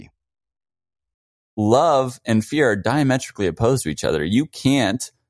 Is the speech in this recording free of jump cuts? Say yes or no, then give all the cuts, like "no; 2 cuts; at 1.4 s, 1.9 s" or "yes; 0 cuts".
no; 1 cut; at 1.5 s